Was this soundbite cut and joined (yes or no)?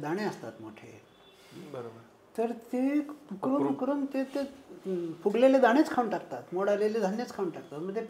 no